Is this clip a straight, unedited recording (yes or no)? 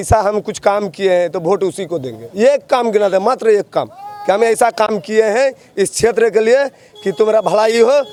yes